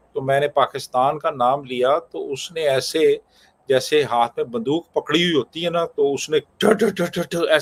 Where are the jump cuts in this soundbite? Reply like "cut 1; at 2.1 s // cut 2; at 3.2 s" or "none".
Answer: none